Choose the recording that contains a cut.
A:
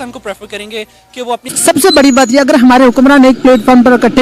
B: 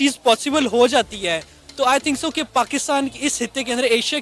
A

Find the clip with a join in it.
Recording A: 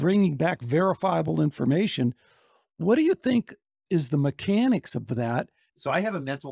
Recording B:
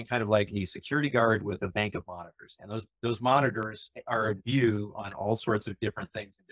A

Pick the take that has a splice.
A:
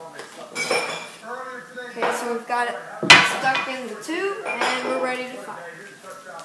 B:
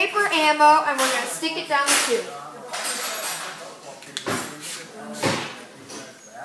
B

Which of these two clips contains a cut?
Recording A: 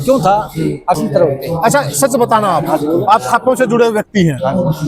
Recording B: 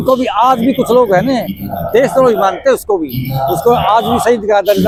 A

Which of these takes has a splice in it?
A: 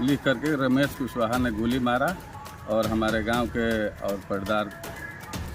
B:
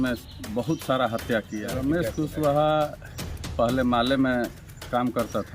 B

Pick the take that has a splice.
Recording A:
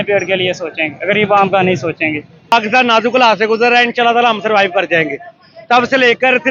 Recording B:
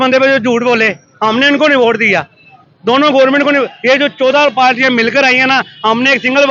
A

